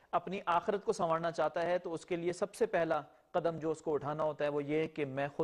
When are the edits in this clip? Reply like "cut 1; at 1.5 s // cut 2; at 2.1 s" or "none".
cut 1; at 1.6 s